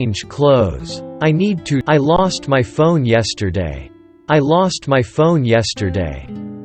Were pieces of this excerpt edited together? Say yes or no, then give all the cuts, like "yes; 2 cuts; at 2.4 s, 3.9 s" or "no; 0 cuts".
no; 0 cuts